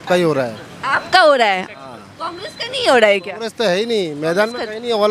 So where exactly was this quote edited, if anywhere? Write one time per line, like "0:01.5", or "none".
none